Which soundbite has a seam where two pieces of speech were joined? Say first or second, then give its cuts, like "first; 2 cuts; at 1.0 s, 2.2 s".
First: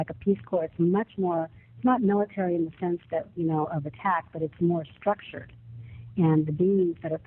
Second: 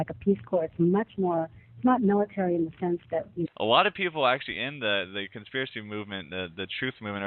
first; 1 cut; at 3.5 s